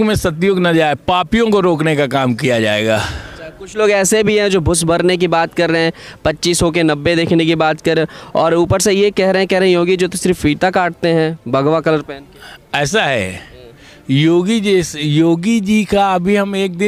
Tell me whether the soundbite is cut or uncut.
uncut